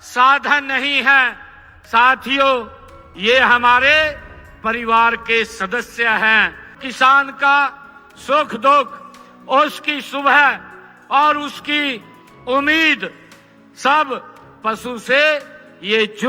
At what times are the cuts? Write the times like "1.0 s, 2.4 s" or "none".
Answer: 6.8 s